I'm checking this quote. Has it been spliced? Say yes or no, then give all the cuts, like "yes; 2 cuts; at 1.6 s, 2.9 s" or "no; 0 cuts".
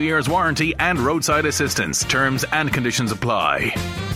no; 0 cuts